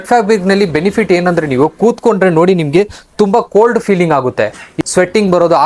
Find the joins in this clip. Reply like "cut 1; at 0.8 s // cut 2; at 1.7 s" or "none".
cut 1; at 4.7 s